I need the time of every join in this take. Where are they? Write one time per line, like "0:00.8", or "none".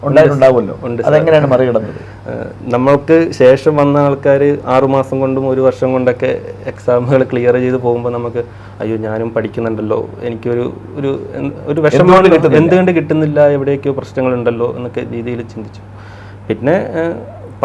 none